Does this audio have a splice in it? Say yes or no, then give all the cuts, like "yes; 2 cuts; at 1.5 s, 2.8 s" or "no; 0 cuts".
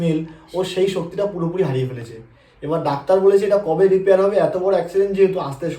no; 0 cuts